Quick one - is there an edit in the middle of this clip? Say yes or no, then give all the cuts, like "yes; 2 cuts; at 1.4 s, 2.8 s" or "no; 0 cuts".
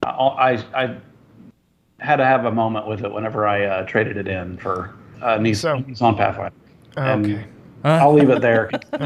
no; 0 cuts